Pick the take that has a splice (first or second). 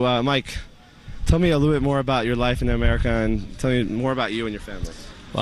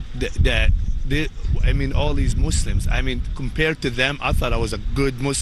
second